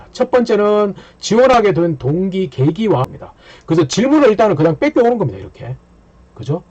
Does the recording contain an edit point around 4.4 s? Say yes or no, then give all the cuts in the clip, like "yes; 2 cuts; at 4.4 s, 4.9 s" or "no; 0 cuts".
no; 1 cut; at 3.0 s